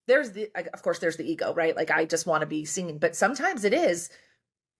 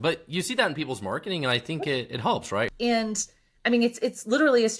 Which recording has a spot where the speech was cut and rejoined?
second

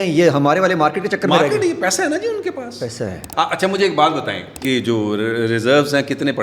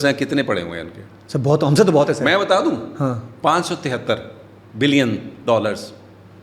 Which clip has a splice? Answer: first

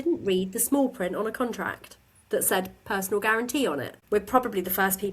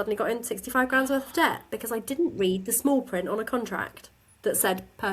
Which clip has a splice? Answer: first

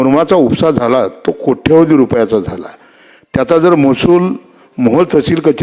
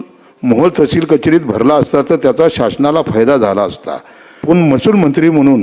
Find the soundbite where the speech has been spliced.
second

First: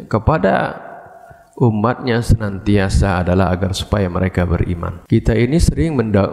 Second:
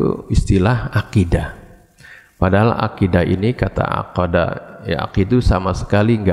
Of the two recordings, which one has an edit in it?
first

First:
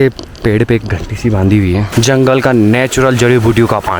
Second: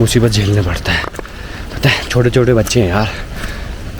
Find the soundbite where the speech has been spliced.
first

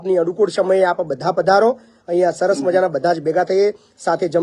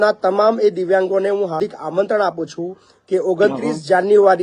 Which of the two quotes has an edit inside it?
second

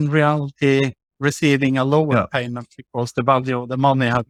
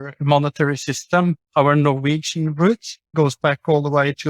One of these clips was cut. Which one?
second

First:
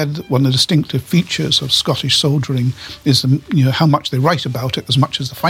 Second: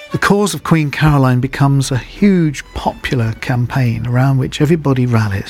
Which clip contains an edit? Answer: first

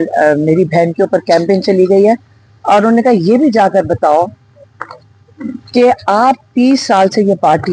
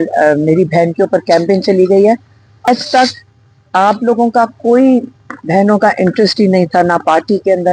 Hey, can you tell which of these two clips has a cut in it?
second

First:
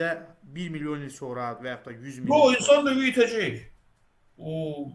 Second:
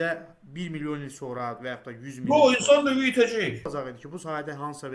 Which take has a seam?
second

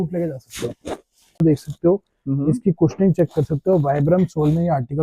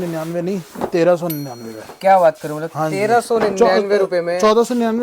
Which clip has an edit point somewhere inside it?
first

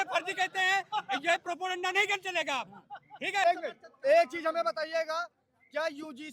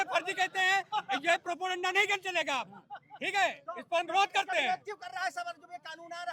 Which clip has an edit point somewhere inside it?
first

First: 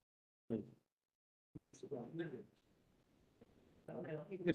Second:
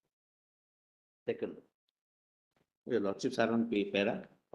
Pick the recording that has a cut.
first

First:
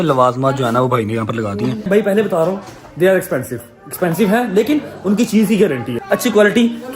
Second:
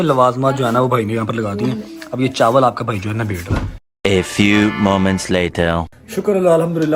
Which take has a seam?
first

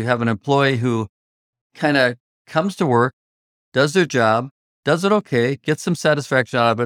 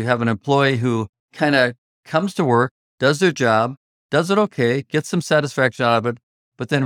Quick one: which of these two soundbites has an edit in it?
second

